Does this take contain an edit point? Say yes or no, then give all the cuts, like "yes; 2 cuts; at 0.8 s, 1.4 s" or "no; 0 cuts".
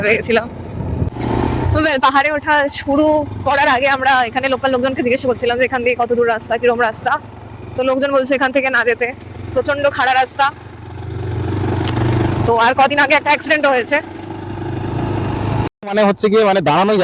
yes; 2 cuts; at 1.2 s, 15.7 s